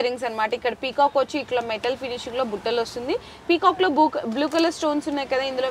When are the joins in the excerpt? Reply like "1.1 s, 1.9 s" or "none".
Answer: none